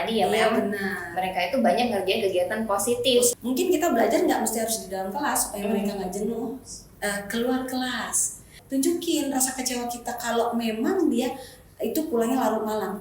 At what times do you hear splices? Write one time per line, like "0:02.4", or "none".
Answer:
0:03.4
0:08.6